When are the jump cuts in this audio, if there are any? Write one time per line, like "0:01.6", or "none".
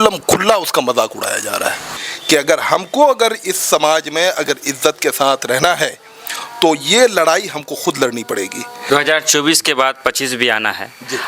0:02.0
0:08.7